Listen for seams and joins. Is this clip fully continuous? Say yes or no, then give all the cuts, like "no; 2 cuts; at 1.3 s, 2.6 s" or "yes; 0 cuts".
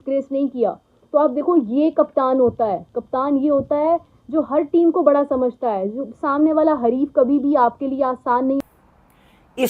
no; 1 cut; at 8.6 s